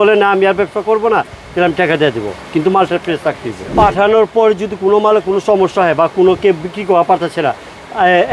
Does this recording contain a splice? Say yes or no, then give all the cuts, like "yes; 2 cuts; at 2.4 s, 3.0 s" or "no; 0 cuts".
yes; 1 cut; at 3.7 s